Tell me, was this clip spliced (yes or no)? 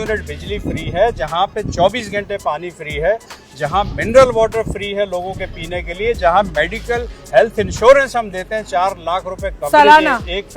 no